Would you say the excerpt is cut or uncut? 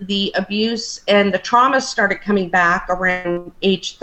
uncut